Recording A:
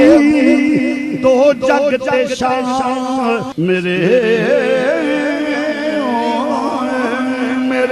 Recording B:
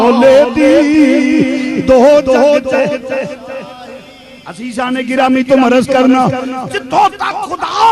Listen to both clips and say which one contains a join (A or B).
A